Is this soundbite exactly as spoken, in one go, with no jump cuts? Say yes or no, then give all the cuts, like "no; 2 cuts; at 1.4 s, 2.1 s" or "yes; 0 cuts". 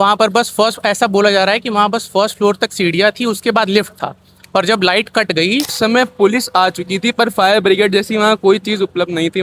no; 1 cut; at 5.7 s